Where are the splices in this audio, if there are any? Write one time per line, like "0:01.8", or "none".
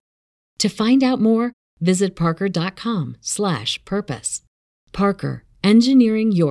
none